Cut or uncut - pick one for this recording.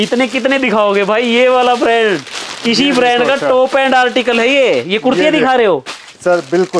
uncut